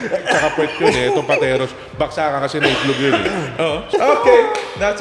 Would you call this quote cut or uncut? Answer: cut